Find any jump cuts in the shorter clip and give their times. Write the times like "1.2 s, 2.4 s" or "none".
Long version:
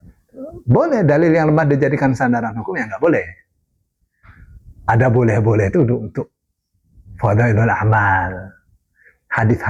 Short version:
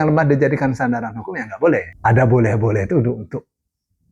1.9 s